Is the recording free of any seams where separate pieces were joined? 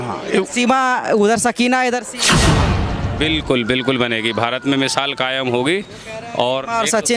no; 1 cut; at 2.6 s

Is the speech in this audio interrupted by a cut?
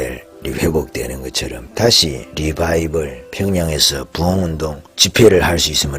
yes; 2 cuts; at 1.6 s, 2.3 s

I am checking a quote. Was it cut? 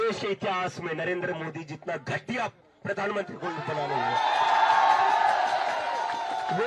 no; 0 cuts

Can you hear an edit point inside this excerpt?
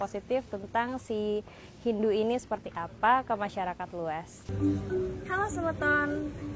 yes; 1 cut; at 4.5 s

